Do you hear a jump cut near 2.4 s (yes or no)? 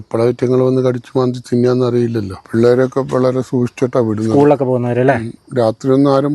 yes